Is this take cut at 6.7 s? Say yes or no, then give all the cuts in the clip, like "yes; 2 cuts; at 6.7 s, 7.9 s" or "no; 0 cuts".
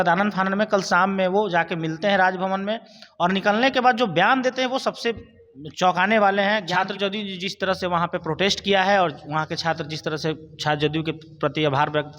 yes; 1 cut; at 6.7 s